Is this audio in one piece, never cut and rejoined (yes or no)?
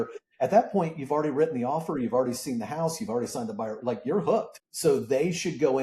no